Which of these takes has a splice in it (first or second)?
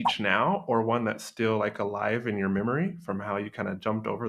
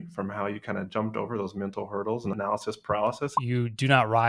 second